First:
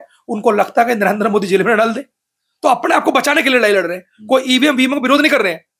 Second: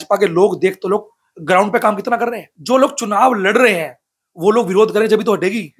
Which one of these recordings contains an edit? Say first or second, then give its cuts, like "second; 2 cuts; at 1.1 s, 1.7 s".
second; 1 cut; at 2.5 s